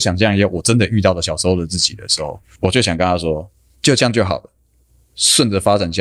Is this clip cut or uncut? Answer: uncut